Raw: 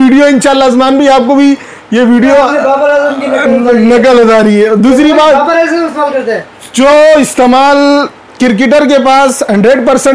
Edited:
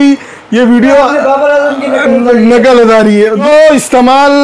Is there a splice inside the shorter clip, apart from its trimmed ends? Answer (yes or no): yes